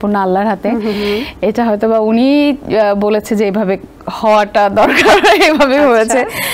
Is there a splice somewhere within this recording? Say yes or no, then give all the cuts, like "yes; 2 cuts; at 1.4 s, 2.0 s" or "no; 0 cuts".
no; 0 cuts